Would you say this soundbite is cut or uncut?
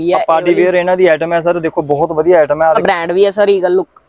cut